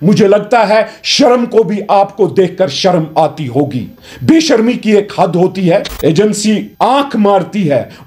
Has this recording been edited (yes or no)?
yes